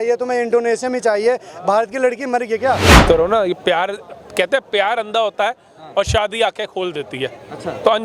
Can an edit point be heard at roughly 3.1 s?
yes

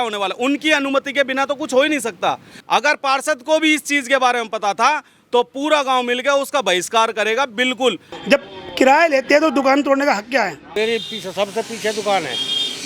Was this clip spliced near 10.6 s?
yes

